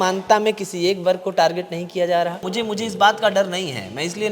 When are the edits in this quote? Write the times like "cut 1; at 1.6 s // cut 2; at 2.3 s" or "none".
cut 1; at 2.5 s